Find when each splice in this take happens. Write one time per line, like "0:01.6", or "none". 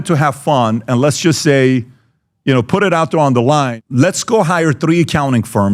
0:03.7